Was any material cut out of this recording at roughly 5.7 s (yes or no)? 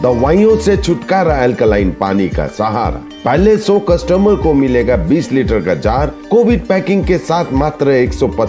no